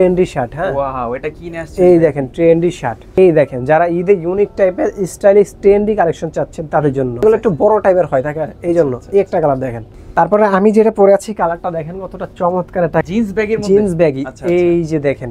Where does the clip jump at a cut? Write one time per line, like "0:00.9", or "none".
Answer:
0:03.0
0:07.2
0:10.0
0:13.0